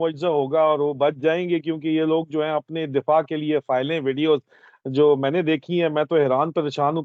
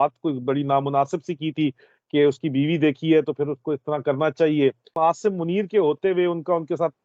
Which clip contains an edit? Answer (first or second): second